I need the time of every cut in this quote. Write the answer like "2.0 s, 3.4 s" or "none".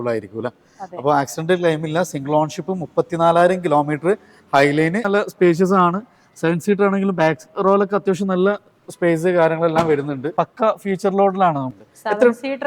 5.1 s, 10.3 s, 11.7 s